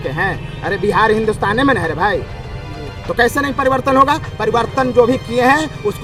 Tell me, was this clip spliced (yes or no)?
no